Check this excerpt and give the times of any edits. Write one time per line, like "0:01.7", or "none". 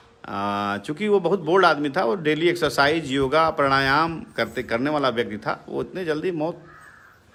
none